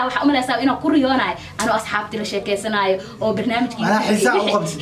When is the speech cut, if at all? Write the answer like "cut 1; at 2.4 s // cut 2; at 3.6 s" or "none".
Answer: none